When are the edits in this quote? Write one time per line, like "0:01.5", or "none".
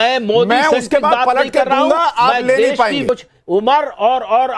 0:03.0